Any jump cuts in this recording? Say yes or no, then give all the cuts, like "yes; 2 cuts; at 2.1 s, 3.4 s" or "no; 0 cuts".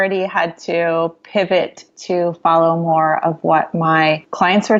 no; 0 cuts